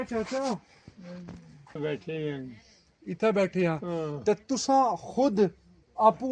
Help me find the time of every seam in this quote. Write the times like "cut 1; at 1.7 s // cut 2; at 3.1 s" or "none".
cut 1; at 1.8 s